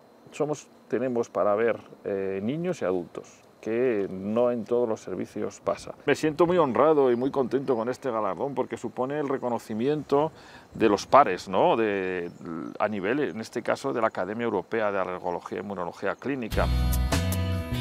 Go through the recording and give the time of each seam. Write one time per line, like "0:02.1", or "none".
0:05.9
0:16.7